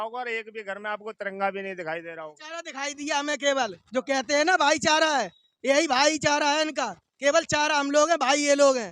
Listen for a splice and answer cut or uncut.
cut